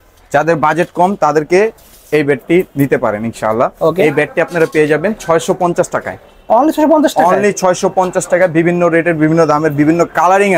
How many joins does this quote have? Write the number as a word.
zero